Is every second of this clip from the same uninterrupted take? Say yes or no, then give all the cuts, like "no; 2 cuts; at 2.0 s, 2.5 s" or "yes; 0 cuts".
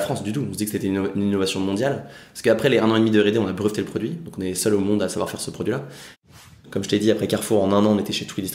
no; 1 cut; at 6.3 s